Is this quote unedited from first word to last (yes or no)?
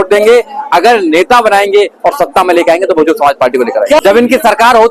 no